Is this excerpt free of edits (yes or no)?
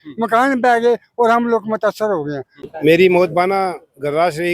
no